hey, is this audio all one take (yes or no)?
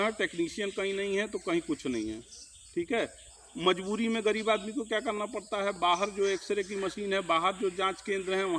yes